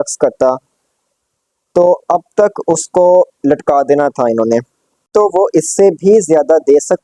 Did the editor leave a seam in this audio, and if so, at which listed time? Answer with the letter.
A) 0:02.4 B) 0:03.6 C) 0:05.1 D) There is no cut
C